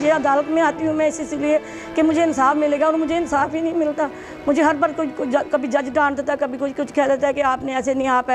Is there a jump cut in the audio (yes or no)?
no